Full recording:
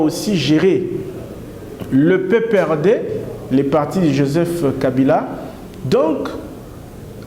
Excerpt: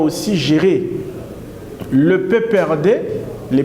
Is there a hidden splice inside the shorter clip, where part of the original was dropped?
no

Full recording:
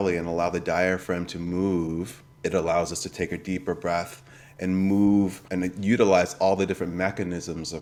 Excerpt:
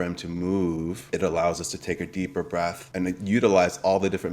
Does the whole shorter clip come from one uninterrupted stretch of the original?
no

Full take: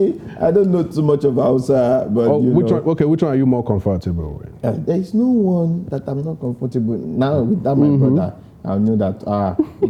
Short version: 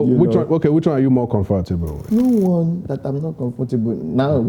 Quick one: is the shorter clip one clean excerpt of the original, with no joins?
no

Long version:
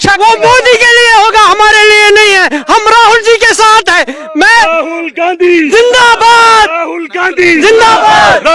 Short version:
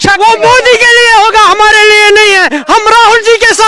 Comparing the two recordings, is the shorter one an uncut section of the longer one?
yes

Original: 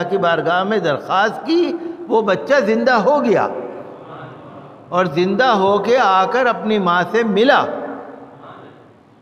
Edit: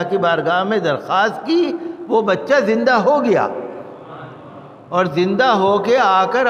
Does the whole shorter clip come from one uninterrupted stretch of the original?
yes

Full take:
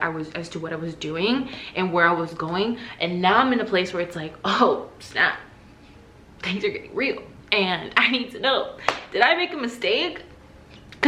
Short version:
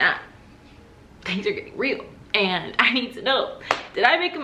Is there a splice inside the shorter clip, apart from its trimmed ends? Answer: no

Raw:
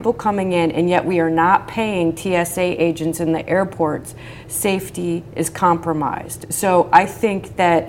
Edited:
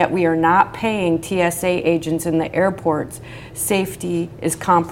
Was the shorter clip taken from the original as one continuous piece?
yes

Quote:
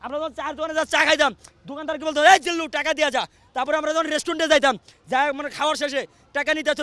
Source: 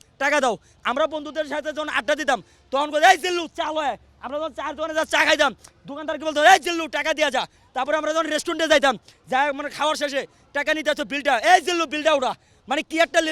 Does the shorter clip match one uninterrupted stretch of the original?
yes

